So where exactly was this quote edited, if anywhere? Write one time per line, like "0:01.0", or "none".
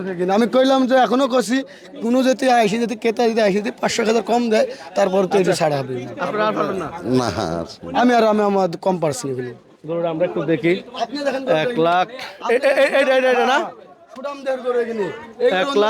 none